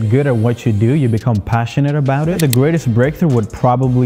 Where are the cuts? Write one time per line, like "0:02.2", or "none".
0:02.4